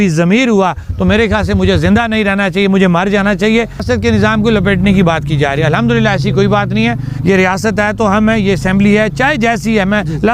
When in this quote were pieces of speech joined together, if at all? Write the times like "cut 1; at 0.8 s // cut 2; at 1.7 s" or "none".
cut 1; at 3.8 s